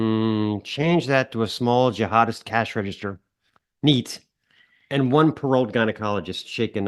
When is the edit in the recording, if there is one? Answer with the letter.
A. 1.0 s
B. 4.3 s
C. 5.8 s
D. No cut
D